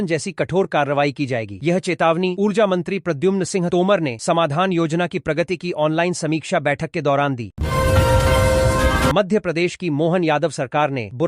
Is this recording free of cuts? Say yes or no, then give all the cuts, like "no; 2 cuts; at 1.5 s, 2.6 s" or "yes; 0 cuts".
no; 2 cuts; at 7.5 s, 9.1 s